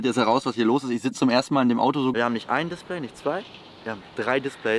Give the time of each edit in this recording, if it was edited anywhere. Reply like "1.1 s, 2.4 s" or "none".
2.1 s